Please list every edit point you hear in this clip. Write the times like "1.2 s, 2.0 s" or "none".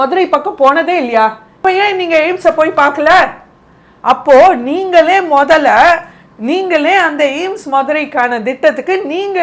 1.6 s